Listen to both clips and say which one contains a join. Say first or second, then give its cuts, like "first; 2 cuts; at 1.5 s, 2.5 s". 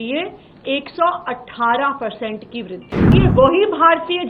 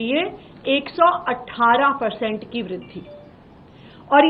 first; 1 cut; at 3.1 s